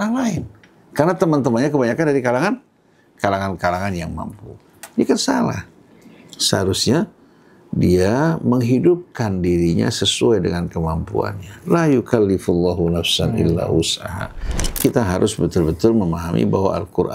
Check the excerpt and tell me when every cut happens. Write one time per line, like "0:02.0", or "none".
0:14.8